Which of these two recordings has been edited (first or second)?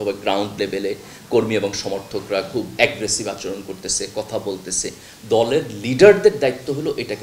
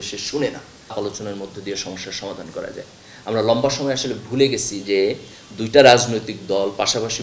second